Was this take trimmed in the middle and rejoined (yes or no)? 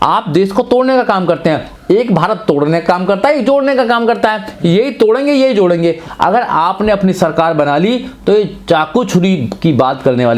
yes